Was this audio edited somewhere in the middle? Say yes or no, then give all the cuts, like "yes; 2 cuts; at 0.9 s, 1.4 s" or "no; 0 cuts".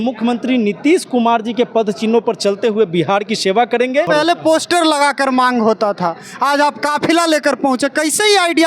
yes; 1 cut; at 4.1 s